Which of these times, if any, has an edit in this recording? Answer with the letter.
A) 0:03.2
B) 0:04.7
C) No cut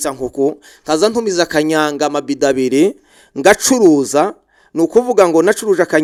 C